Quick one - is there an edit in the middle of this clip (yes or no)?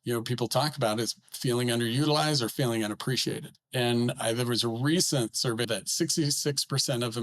yes